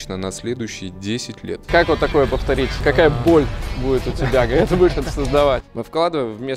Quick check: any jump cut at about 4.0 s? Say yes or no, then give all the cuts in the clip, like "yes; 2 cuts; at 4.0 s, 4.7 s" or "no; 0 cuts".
no; 3 cuts; at 1.6 s, 2.8 s, 5.7 s